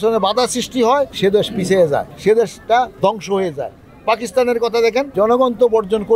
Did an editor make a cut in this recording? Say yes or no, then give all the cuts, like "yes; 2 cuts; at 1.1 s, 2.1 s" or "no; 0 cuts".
yes; 3 cuts; at 1.1 s, 2.1 s, 5.1 s